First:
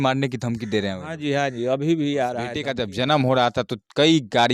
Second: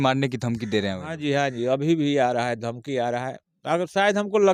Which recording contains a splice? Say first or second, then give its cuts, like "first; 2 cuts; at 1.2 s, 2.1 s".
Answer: first; 1 cut; at 2.6 s